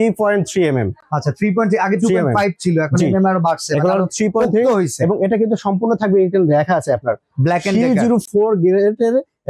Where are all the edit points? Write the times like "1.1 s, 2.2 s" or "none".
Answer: none